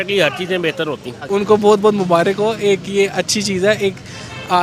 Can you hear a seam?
yes; 1 cut; at 1.3 s

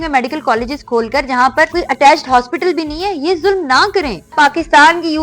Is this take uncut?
no; 2 cuts; at 1.7 s, 4.3 s

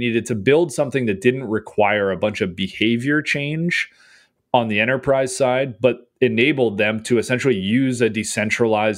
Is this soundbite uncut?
yes; 0 cuts

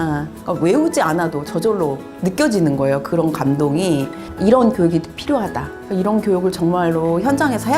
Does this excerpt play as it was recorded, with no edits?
no; 2 cuts; at 2.1 s, 4.2 s

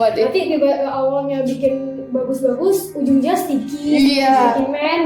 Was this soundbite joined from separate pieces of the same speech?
no; 0 cuts

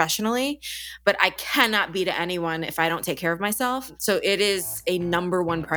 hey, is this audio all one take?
no; 1 cut; at 1.4 s

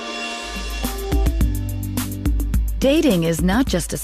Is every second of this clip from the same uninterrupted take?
yes; 0 cuts

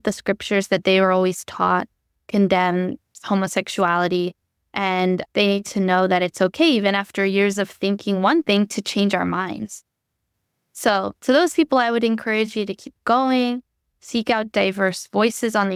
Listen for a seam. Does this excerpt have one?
no; 0 cuts

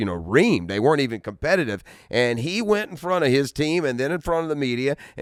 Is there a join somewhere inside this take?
no; 0 cuts

